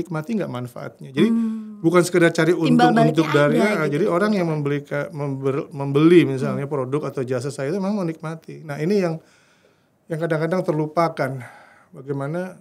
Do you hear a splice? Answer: no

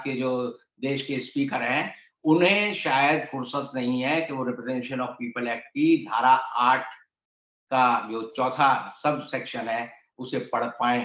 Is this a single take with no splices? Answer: yes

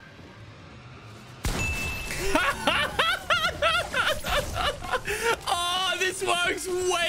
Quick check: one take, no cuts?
yes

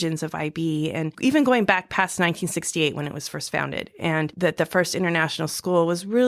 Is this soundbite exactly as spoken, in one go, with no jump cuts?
no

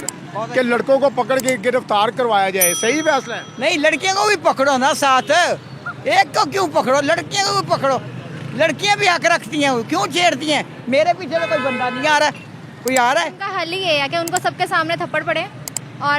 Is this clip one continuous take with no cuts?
no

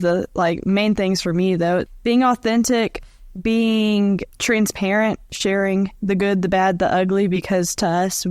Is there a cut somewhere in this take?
yes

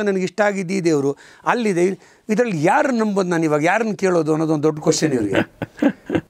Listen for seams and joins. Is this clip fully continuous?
yes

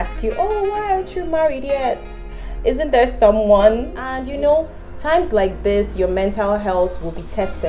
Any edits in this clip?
yes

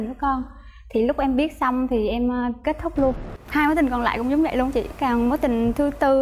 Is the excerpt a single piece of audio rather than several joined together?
no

